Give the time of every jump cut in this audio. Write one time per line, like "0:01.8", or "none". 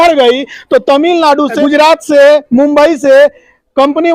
0:01.5